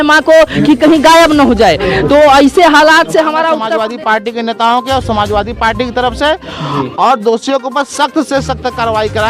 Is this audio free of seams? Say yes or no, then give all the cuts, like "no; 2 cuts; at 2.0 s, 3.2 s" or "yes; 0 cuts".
no; 1 cut; at 3.7 s